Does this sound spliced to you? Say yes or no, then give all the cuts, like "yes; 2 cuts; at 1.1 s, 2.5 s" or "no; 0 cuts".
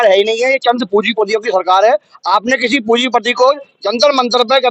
no; 0 cuts